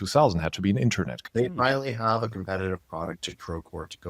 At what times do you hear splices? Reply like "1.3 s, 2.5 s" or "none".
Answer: 1.2 s